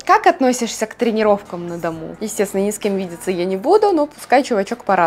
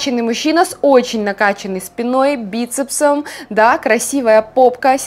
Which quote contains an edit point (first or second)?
first